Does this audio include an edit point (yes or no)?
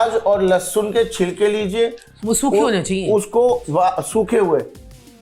no